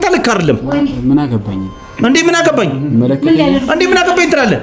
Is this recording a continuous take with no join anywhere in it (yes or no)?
yes